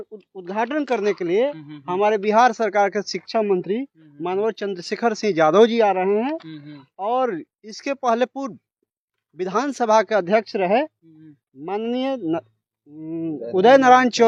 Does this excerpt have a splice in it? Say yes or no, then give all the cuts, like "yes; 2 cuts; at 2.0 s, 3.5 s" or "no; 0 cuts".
no; 0 cuts